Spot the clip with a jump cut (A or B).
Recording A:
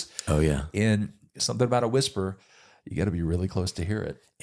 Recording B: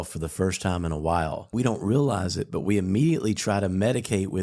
B